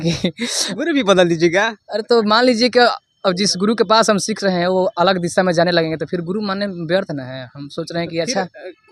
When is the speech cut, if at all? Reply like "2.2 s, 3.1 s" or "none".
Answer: none